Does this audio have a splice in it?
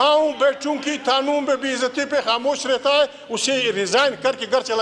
no; 0 cuts

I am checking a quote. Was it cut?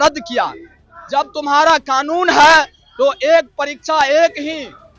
no; 0 cuts

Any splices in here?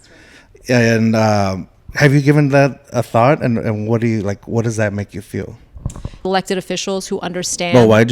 yes; 1 cut; at 6.2 s

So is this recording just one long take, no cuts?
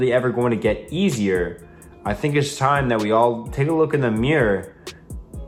yes; 0 cuts

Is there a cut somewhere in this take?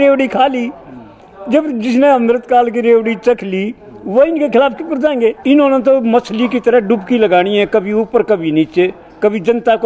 yes; 1 cut; at 5.4 s

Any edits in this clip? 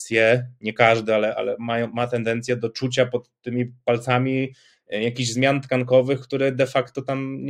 no; 0 cuts

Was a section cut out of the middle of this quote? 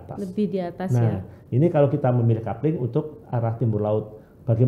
no; 0 cuts

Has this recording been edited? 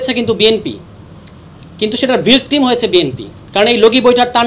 no; 0 cuts

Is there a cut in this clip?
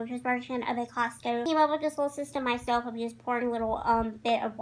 yes; 1 cut; at 1.4 s

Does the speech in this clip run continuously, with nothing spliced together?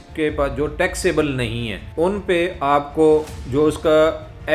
no; 2 cuts; at 1.8 s, 3.4 s

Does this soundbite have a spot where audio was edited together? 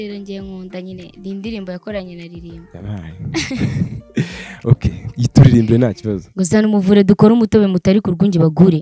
no; 0 cuts

